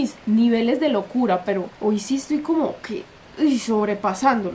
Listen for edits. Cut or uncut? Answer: uncut